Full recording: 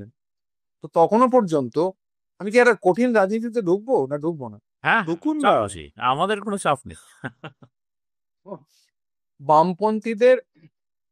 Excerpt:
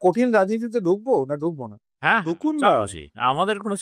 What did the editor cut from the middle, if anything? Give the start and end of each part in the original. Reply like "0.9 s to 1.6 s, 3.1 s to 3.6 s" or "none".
none